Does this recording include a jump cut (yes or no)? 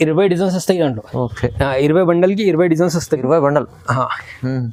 no